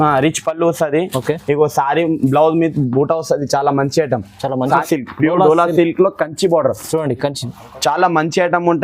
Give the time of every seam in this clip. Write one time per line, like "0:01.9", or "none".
0:04.8